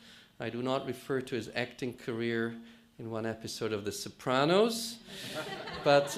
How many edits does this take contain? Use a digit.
1